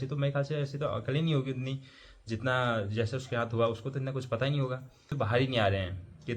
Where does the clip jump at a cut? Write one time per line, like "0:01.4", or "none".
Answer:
0:05.1

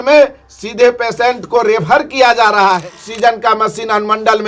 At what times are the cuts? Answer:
0:03.1

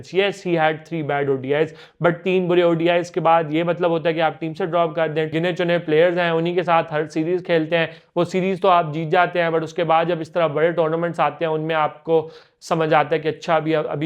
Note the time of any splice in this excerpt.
0:05.3

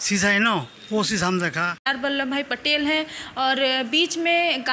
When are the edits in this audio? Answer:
0:01.8

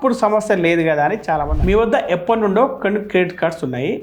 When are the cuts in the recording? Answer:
0:01.5

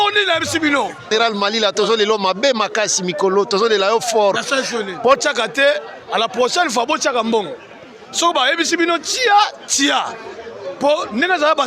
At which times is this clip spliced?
0:01.1
0:05.2

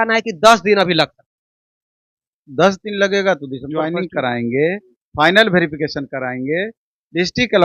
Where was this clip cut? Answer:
0:03.8

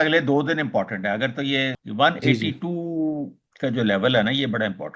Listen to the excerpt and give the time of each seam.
0:01.8

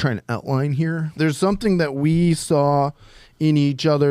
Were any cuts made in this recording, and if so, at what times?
0:01.2

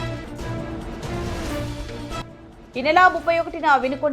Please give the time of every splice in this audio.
0:02.2

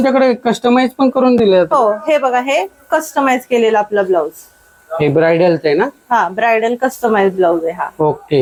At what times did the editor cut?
none

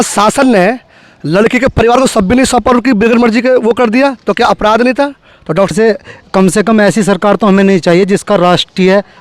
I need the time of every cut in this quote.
0:05.7

